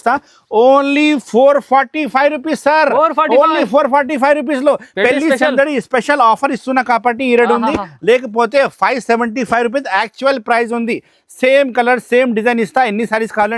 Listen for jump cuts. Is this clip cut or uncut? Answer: uncut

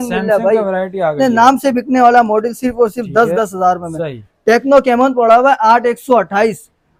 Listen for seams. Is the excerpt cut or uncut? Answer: uncut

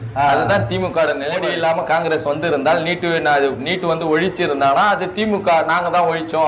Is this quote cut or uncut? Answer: cut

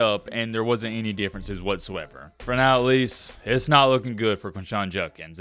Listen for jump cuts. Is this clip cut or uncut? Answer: cut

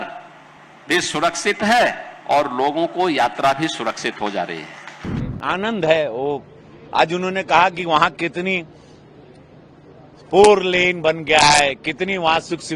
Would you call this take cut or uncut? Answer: cut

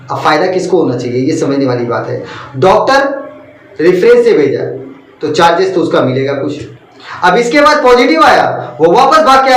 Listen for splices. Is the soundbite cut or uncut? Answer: uncut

